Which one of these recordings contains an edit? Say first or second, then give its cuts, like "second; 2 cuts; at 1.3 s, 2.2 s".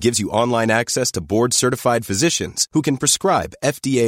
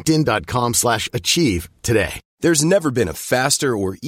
second; 1 cut; at 2.2 s